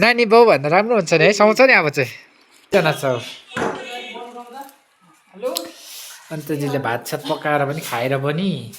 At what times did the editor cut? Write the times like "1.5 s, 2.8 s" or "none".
2.7 s